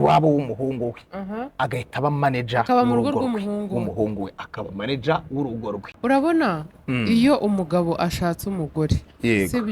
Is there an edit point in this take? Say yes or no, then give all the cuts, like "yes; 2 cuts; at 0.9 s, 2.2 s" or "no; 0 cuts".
yes; 1 cut; at 5.9 s